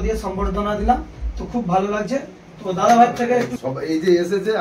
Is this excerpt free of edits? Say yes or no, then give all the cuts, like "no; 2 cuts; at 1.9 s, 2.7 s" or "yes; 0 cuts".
no; 1 cut; at 3.5 s